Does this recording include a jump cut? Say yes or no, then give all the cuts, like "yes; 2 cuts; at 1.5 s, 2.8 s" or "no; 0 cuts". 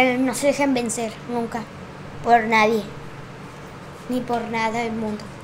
no; 0 cuts